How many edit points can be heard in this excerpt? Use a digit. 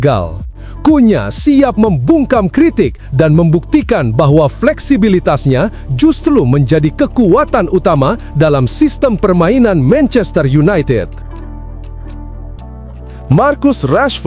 2